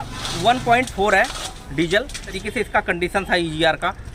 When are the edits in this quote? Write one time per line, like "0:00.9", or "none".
0:02.3